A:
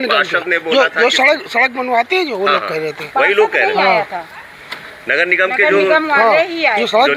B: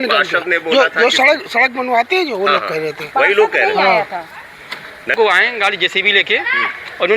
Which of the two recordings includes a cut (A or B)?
B